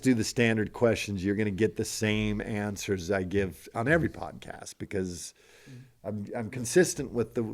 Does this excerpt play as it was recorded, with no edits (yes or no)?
yes